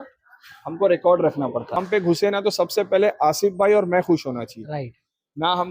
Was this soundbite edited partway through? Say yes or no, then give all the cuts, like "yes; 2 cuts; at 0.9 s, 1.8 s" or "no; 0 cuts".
yes; 1 cut; at 1.8 s